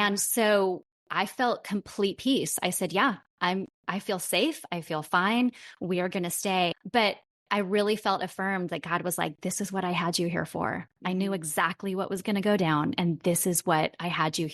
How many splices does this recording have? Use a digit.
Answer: 1